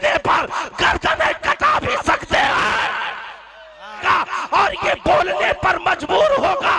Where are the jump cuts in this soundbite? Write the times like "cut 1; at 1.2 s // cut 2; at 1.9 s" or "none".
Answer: cut 1; at 4.0 s